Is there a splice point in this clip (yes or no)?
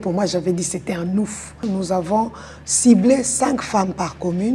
yes